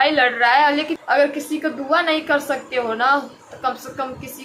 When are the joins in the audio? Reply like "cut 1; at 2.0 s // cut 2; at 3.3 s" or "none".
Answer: cut 1; at 1.0 s